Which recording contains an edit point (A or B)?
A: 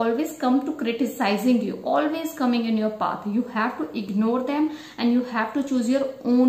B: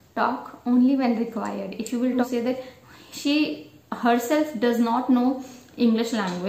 B